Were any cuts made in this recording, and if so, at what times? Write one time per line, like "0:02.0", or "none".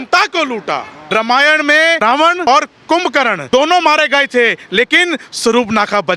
0:01.0
0:02.2
0:03.4